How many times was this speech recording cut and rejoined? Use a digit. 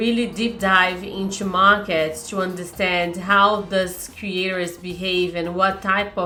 0